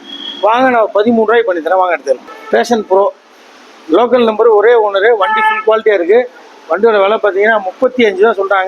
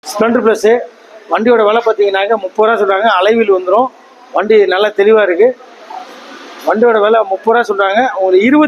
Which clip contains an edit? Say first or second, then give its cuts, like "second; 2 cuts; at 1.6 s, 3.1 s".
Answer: first; 1 cut; at 2.3 s